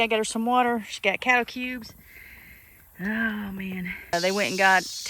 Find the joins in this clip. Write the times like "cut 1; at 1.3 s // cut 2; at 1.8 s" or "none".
cut 1; at 4.1 s

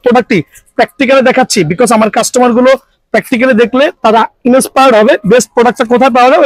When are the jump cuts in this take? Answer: none

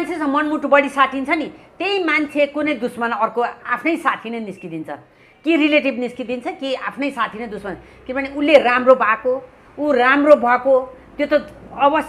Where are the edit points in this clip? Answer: none

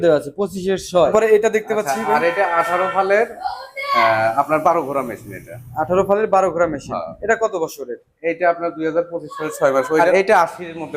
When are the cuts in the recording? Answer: cut 1; at 1.1 s // cut 2; at 10.0 s

